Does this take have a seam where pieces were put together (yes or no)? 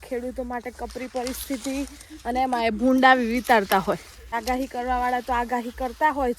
yes